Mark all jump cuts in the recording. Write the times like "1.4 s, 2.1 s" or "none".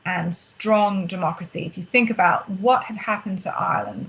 none